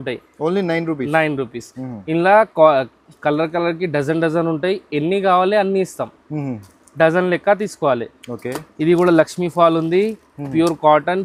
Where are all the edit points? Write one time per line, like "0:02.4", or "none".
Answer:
none